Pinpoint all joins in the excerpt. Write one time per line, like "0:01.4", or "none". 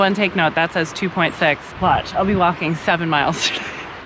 0:01.7